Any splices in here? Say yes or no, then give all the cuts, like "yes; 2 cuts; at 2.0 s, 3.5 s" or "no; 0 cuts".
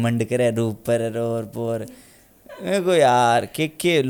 no; 0 cuts